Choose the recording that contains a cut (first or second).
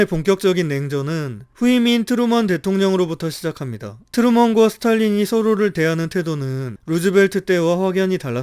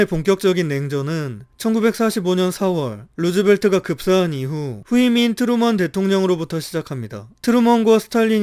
first